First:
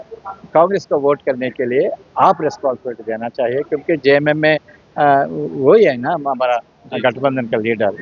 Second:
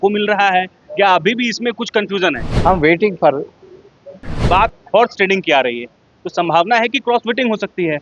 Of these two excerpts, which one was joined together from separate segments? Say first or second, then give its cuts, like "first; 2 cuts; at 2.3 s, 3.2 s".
second; 2 cuts; at 2.5 s, 4.4 s